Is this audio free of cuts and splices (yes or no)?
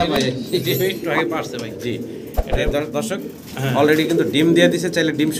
yes